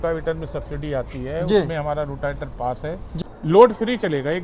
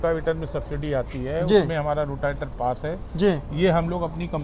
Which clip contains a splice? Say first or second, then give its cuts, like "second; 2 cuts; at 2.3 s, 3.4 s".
first; 1 cut; at 3.1 s